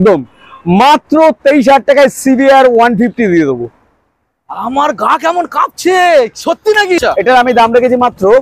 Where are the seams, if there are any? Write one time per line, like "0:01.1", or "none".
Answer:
0:07.0